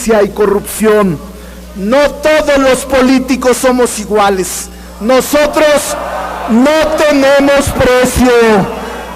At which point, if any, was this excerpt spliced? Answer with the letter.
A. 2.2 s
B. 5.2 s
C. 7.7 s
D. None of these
A